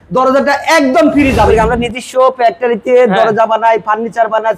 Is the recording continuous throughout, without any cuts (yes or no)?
no